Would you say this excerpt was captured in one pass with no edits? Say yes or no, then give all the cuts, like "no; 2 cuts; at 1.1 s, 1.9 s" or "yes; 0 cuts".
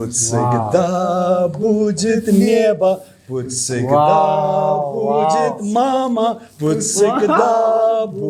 yes; 0 cuts